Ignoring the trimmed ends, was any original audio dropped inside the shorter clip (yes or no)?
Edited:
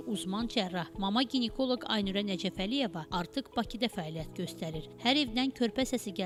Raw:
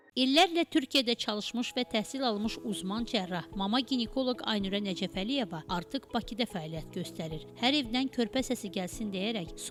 no